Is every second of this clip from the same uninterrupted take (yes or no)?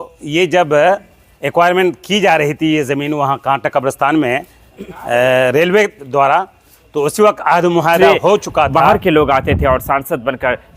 no